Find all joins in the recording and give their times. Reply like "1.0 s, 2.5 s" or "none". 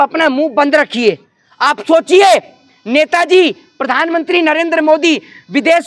none